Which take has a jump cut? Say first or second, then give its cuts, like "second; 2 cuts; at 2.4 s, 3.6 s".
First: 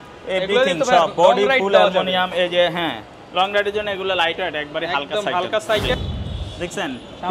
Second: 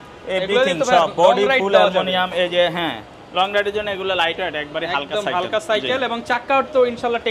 first; 1 cut; at 5.9 s